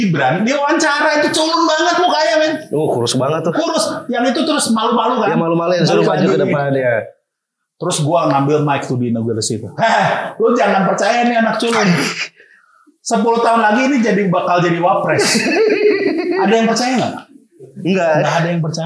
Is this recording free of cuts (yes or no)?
yes